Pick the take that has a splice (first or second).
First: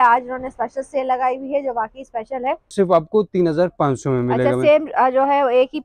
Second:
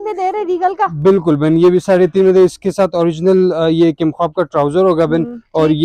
first